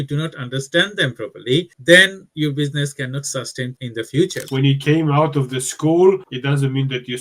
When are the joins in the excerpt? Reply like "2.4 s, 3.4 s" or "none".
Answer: 4.4 s

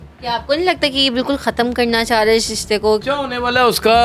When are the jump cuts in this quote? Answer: 3.0 s

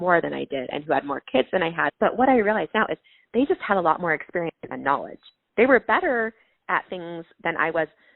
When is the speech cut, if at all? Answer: 1.9 s

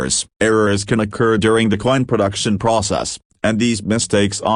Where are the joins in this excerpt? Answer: none

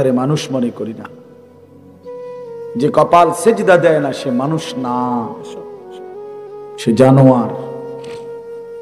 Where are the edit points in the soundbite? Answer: 5.3 s, 6.8 s

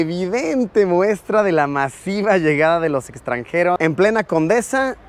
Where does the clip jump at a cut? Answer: none

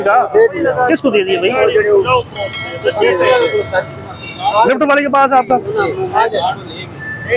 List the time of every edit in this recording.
none

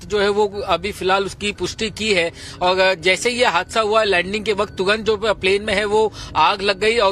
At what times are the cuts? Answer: 4.7 s

